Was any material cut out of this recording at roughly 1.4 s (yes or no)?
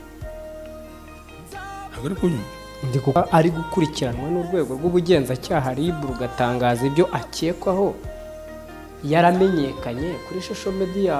no